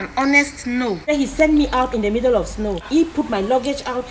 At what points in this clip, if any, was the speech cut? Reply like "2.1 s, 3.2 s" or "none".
1.1 s, 2.9 s